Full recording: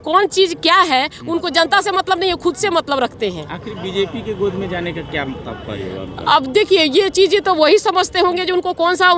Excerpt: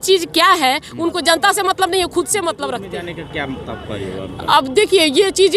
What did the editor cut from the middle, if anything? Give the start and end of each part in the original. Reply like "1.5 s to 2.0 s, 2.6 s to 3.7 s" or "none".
3.2 s to 4.7 s